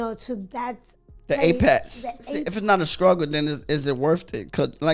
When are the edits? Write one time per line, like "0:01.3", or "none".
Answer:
0:02.5